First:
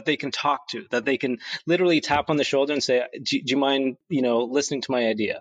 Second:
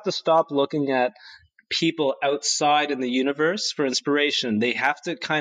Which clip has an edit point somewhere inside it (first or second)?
first